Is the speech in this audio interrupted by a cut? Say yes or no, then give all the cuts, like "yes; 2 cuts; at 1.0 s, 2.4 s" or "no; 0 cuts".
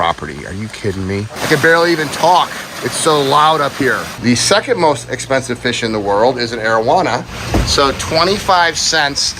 yes; 3 cuts; at 1.4 s, 4.1 s, 7.3 s